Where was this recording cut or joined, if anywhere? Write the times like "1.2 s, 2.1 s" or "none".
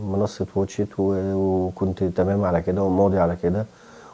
none